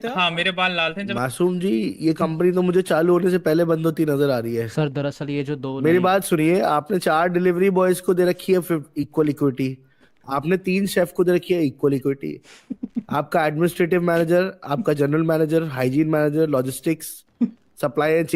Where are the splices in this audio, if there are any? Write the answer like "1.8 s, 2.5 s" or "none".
1.1 s